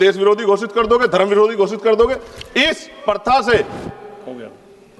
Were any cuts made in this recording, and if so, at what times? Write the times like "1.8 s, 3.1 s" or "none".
none

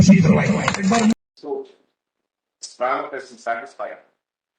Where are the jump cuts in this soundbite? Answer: 1.1 s

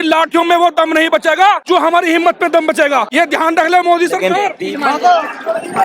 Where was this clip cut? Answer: 1.6 s, 3.1 s, 4.6 s

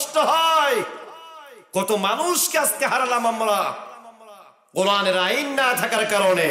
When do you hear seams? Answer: none

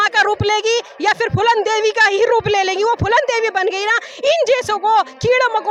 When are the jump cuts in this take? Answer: none

